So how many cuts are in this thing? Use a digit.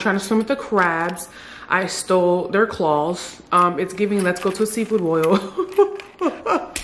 0